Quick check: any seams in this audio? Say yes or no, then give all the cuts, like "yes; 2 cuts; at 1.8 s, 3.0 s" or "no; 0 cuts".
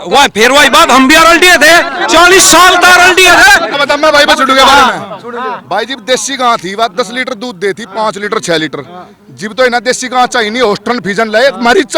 yes; 1 cut; at 3.7 s